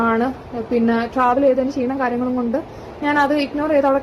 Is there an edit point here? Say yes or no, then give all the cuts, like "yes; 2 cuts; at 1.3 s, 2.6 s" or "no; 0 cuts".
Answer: no; 0 cuts